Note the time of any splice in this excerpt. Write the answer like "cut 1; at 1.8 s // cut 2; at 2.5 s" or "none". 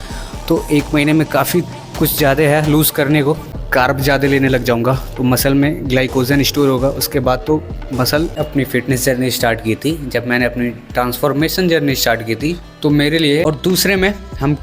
cut 1; at 3.6 s // cut 2; at 8.3 s // cut 3; at 13.4 s